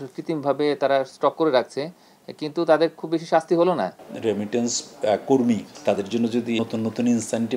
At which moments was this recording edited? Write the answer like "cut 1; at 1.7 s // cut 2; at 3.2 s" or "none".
cut 1; at 4.1 s // cut 2; at 5.7 s // cut 3; at 6.6 s